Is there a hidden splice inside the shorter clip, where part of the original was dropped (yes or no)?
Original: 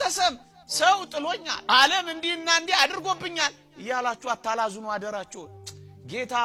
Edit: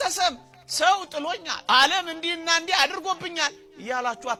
no